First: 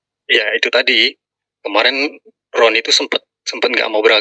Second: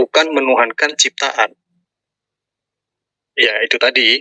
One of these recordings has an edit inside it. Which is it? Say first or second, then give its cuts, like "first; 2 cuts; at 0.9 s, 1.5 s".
second; 1 cut; at 1.7 s